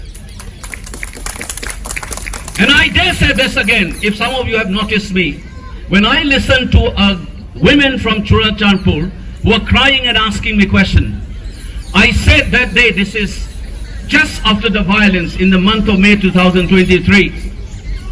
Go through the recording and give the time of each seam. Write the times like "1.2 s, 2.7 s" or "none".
none